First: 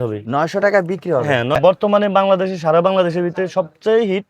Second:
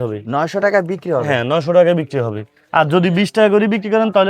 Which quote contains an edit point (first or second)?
first